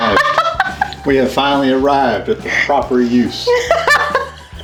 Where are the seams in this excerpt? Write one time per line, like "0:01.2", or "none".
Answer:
none